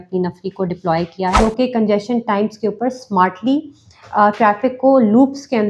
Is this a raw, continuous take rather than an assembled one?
no; 1 cut; at 1.4 s

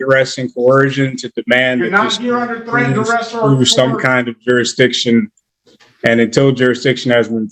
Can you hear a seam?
no; 0 cuts

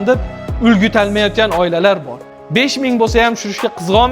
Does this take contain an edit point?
yes; 1 cut; at 2.1 s

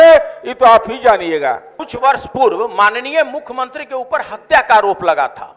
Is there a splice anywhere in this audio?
yes; 1 cut; at 1.8 s

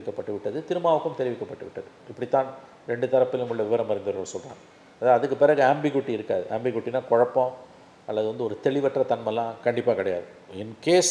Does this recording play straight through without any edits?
yes; 0 cuts

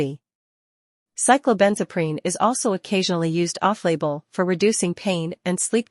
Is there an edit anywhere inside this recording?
yes; 1 cut; at 1.6 s

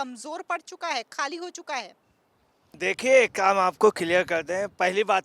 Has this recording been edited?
no; 0 cuts

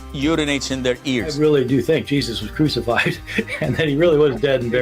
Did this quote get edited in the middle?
yes; 1 cut; at 3.5 s

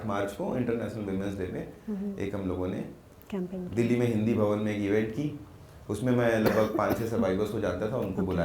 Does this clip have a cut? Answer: no; 0 cuts

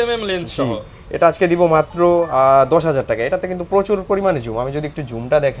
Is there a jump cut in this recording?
no; 0 cuts

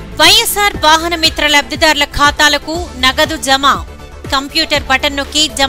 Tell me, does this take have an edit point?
no; 0 cuts

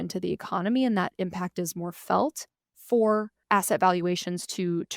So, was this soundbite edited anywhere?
yes; 1 cut; at 3.3 s

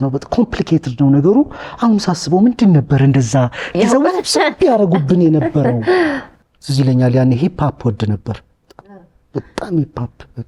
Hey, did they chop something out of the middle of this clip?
yes; 1 cut; at 6.3 s

